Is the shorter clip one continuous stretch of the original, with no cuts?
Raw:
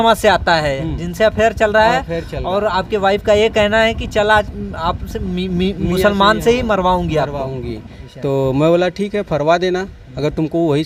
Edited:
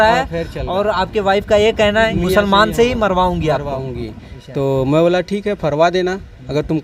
no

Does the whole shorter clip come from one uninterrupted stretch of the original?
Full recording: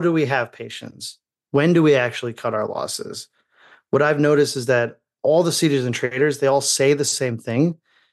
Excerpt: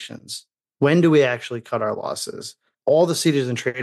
no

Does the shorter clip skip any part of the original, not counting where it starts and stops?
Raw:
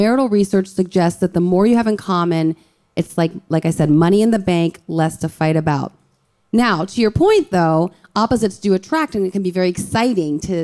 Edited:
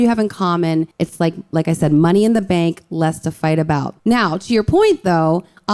yes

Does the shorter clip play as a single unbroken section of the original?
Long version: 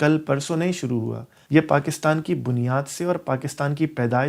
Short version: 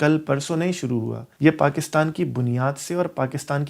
no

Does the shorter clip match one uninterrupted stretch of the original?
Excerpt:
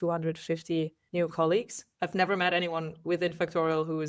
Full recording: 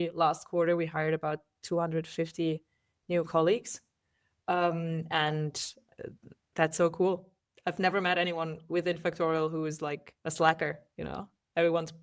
no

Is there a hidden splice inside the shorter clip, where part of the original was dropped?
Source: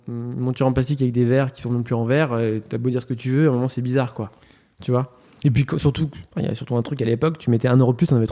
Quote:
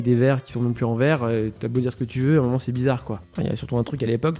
yes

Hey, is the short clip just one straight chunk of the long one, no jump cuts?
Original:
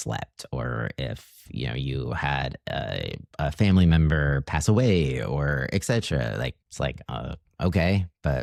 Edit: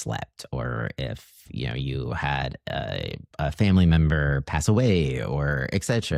yes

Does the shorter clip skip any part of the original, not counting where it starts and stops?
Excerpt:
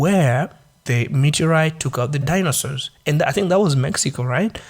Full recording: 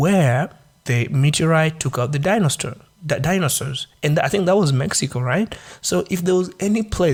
yes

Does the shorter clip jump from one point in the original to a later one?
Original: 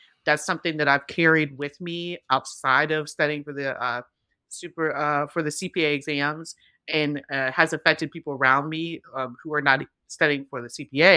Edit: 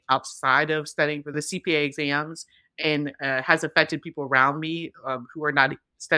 yes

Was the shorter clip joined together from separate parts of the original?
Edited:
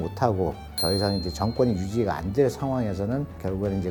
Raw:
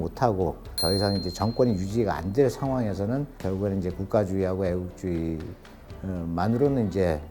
no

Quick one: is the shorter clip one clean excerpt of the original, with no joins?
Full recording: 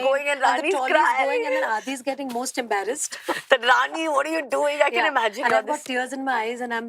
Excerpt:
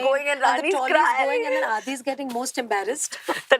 yes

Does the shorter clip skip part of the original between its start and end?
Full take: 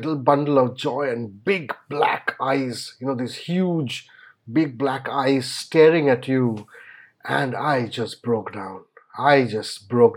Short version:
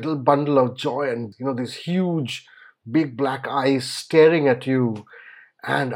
yes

